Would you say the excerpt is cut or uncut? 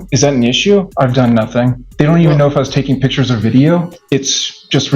cut